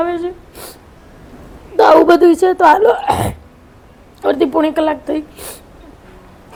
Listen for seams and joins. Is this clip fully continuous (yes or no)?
yes